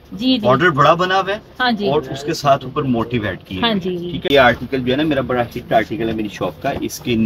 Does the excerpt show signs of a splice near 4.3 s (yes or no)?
yes